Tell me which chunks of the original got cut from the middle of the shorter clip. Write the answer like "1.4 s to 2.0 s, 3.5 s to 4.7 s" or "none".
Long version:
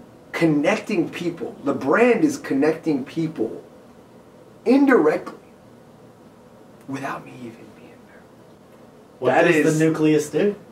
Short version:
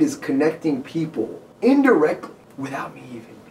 3.6 s to 4.5 s, 5.5 s to 6.7 s